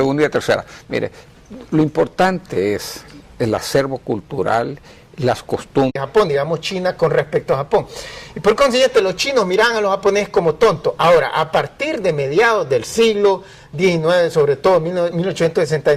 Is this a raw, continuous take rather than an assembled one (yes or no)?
yes